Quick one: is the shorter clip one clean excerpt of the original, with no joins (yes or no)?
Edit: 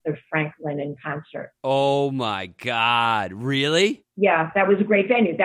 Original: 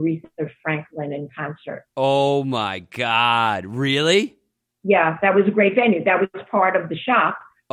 no